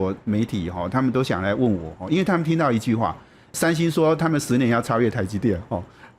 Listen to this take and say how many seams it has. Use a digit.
1